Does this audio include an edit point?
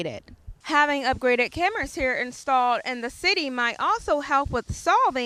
no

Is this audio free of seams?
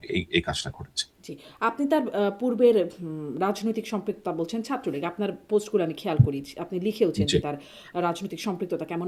yes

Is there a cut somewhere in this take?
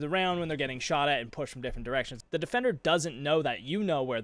yes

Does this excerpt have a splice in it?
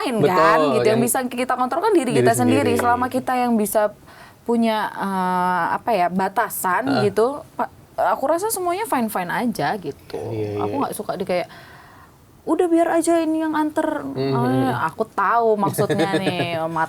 no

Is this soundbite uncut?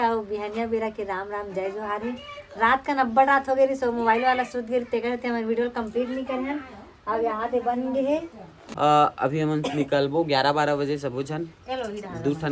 no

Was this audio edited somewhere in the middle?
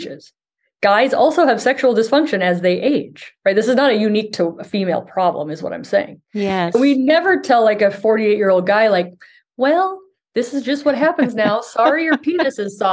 no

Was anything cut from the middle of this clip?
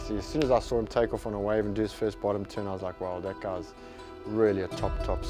no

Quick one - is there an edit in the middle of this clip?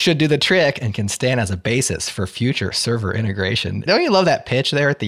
yes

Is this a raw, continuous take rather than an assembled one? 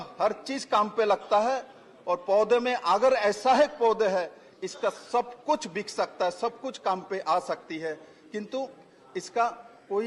yes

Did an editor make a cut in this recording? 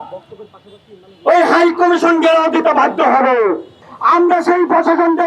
yes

